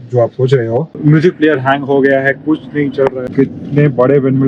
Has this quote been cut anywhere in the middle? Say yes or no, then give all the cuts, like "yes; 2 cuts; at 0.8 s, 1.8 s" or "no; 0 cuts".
yes; 2 cuts; at 0.9 s, 3.3 s